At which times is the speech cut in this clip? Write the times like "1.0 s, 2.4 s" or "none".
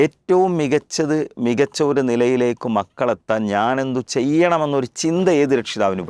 none